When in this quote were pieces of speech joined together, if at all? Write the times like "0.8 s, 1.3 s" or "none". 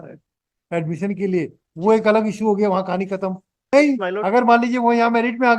3.7 s